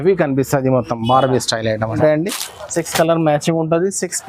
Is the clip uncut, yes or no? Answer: no